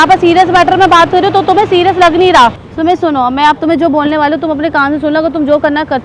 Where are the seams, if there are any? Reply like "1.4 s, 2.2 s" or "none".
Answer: 2.7 s